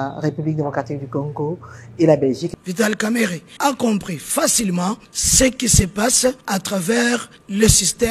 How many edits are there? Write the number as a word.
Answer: one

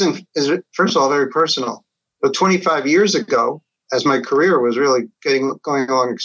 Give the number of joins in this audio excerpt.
zero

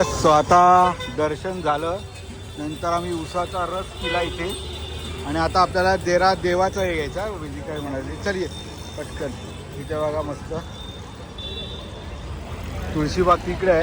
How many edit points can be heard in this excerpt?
zero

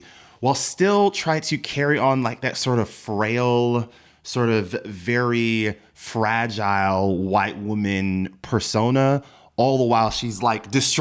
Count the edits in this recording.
zero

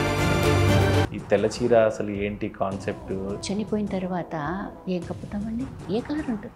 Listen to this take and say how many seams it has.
zero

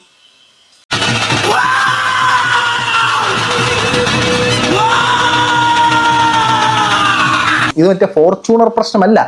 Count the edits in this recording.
one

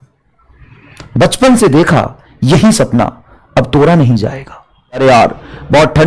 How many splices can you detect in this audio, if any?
one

